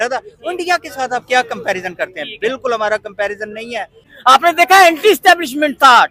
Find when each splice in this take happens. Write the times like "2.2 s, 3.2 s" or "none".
4.0 s

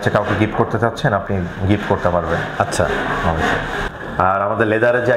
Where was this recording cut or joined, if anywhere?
3.8 s

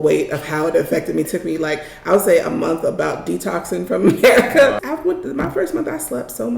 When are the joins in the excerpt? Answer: 1.3 s, 4.9 s

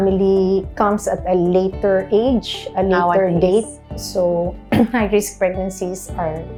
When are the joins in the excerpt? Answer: none

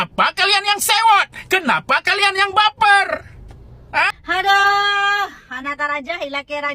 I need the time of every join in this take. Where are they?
4.1 s

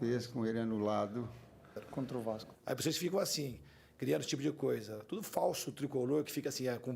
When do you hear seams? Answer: 2.5 s

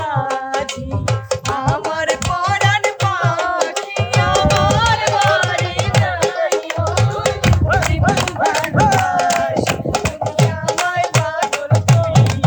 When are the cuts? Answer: none

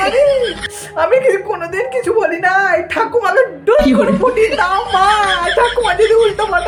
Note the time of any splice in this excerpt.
none

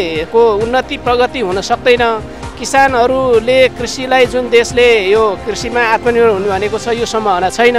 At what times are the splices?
none

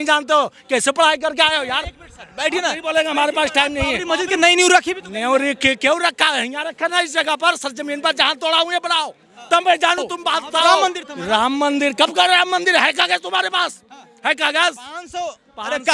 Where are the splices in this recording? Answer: 4.0 s, 10.7 s

